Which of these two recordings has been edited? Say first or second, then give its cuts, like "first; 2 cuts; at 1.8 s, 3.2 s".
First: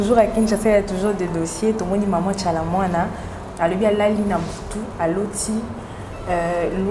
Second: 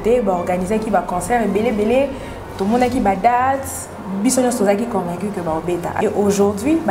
second; 1 cut; at 6.0 s